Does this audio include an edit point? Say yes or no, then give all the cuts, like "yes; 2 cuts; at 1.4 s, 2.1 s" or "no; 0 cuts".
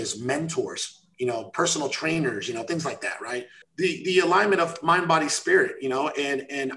yes; 1 cut; at 3.6 s